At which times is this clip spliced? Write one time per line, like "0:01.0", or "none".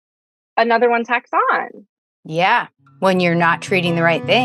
0:01.8

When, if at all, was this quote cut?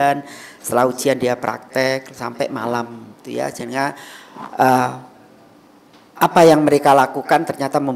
none

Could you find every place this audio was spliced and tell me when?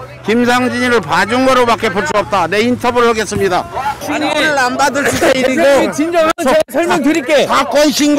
0:04.0

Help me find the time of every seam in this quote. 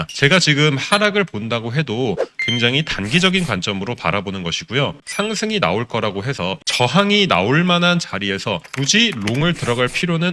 0:05.0
0:06.6

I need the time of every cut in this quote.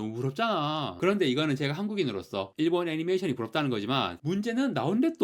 0:00.9

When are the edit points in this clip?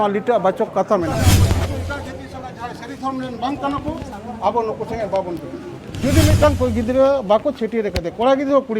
0:01.4
0:05.8

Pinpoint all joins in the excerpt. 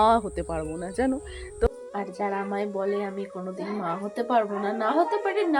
0:01.7

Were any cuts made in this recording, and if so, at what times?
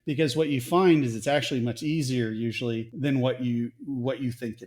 0:02.9

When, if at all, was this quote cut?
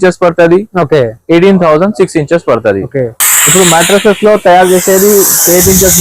0:03.2

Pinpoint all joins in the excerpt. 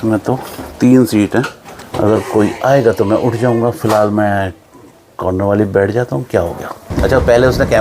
0:01.8
0:06.8

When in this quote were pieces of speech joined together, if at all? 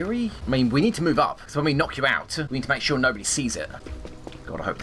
0:03.8

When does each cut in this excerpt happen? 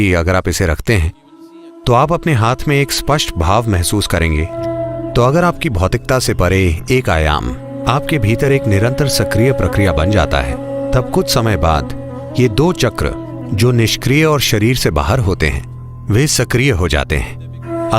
0:04.6

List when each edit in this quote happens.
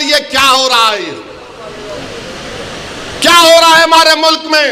none

